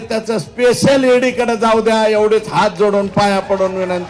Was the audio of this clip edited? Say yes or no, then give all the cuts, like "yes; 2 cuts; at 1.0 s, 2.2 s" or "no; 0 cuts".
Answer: no; 0 cuts